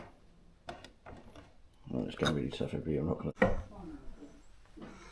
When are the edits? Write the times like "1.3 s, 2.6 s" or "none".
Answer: 3.3 s